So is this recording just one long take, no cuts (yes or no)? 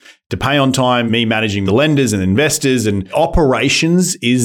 no